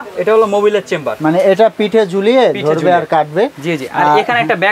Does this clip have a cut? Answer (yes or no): yes